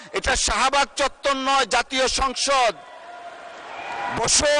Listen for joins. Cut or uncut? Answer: uncut